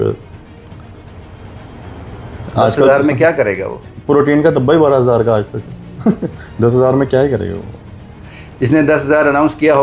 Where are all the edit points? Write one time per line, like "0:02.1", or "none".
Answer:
none